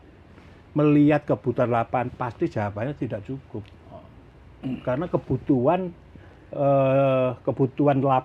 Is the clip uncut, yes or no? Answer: yes